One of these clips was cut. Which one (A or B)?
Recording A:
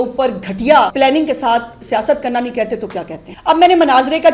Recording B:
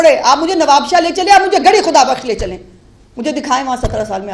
A